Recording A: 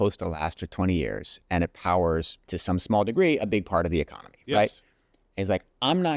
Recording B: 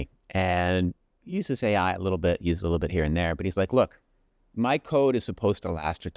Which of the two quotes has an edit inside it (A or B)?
A